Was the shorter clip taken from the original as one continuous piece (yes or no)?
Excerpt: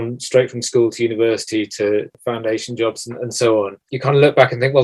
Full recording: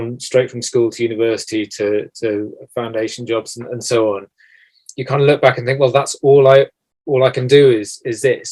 no